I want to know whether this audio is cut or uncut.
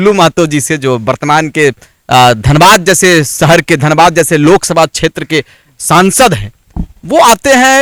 uncut